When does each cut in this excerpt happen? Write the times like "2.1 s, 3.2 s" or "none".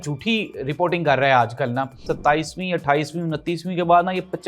2.1 s